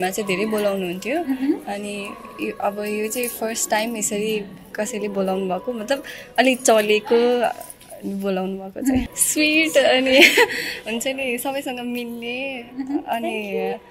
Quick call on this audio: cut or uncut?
cut